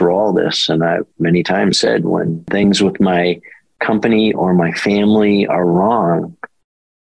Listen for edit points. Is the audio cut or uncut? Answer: cut